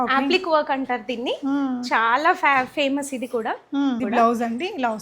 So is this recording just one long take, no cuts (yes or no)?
no